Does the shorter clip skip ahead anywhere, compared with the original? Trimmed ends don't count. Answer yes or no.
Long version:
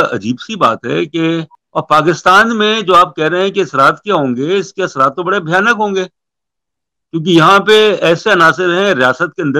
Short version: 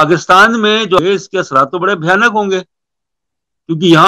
yes